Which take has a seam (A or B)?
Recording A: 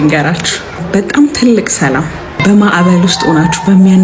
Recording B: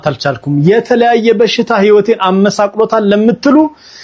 A